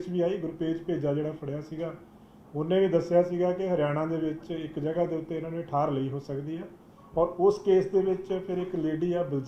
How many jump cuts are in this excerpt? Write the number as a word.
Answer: zero